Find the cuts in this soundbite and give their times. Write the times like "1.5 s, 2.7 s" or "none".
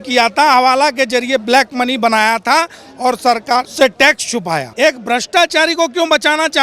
3.7 s, 4.7 s